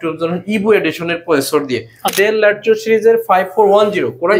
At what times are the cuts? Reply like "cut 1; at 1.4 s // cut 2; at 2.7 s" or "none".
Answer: cut 1; at 2.1 s

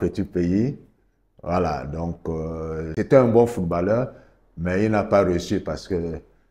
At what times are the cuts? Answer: cut 1; at 2.9 s

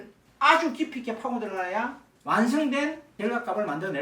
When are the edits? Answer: cut 1; at 3.1 s

